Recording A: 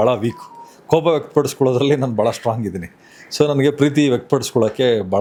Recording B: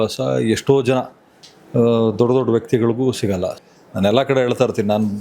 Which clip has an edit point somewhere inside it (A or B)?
B